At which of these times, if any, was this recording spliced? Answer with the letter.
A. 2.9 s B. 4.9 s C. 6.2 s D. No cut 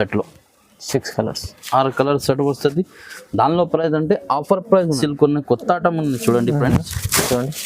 B